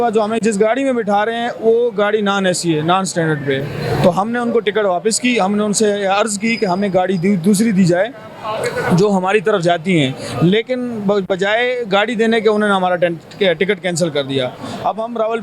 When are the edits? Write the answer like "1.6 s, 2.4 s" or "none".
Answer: none